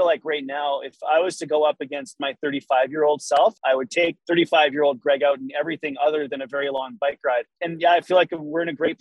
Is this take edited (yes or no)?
yes